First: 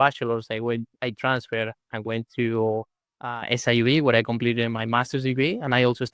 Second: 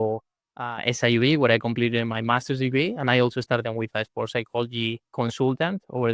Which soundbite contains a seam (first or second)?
second